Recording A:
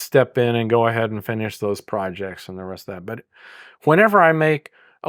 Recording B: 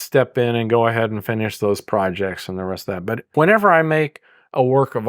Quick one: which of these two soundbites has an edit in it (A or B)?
B